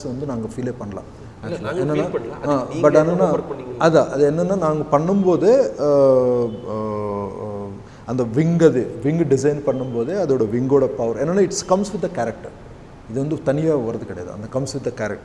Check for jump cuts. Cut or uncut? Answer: uncut